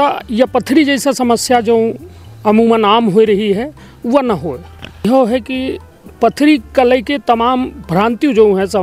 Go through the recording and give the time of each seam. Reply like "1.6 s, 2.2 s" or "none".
5.0 s

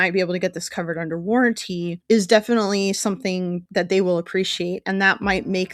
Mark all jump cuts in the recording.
1.9 s, 3.6 s

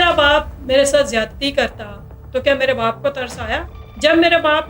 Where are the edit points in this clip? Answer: 3.8 s

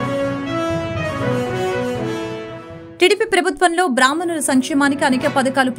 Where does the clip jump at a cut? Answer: none

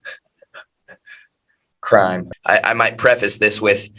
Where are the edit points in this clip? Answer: 2.3 s

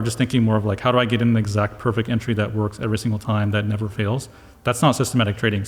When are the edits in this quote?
none

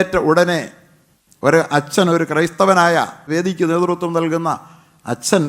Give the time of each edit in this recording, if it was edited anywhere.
3.3 s

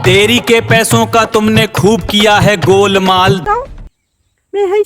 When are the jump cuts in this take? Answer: 3.4 s

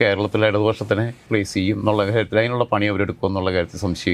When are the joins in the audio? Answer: 1.2 s

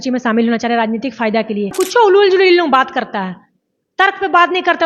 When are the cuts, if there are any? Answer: 1.7 s

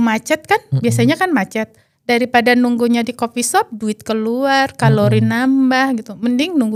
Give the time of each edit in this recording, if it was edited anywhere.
none

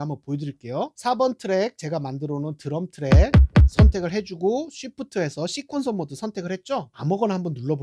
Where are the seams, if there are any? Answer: 0.9 s, 6.9 s

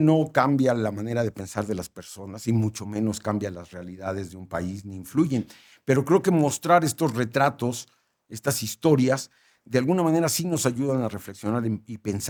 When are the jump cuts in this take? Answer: none

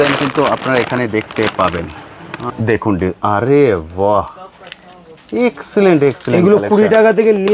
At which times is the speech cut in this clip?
2.4 s

